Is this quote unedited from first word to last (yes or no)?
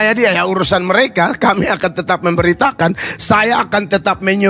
yes